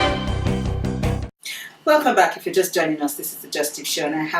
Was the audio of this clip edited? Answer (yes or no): yes